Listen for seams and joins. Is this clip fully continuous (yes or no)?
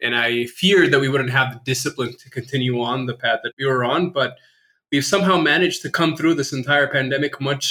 no